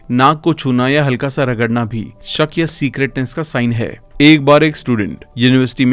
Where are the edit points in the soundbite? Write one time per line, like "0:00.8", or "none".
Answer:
none